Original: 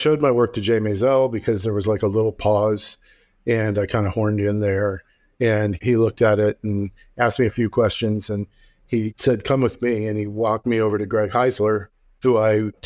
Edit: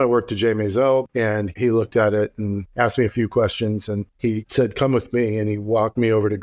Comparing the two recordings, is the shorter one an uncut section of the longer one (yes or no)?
no